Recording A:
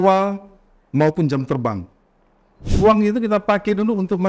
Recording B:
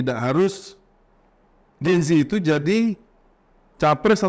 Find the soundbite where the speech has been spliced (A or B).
A